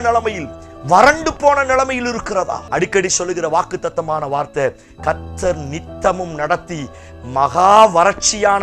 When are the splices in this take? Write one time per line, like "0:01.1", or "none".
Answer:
0:02.6